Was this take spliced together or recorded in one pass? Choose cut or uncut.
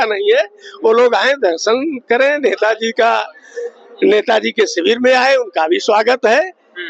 uncut